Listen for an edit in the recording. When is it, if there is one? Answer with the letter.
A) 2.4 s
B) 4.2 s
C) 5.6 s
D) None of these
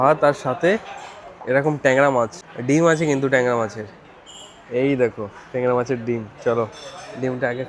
A